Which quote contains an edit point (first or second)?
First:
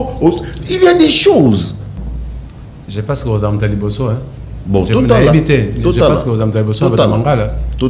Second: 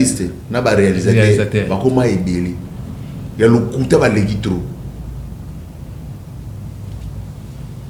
first